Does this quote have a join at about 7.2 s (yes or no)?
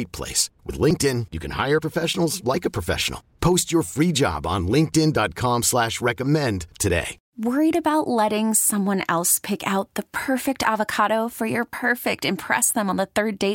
yes